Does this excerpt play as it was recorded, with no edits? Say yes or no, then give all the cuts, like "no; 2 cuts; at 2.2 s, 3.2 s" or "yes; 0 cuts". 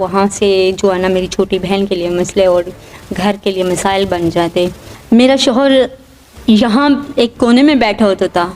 no; 1 cut; at 4.9 s